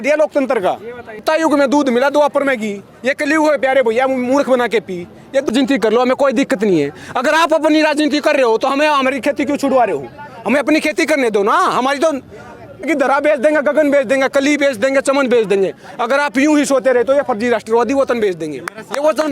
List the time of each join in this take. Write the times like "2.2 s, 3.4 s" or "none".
1.2 s, 5.5 s, 12.9 s